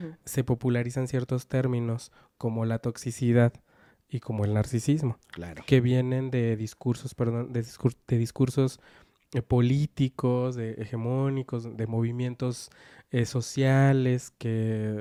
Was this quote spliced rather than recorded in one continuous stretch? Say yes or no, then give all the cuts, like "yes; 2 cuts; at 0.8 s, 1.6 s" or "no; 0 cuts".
no; 0 cuts